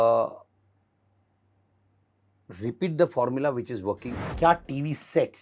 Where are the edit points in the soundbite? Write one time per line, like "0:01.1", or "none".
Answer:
0:04.1